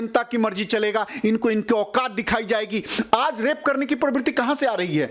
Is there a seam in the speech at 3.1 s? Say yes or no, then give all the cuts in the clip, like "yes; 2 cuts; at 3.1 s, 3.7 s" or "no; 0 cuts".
yes; 1 cut; at 3.1 s